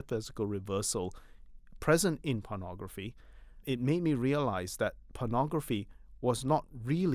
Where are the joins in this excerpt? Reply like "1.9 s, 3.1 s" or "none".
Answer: 3.6 s